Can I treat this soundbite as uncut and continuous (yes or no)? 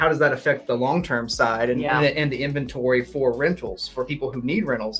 yes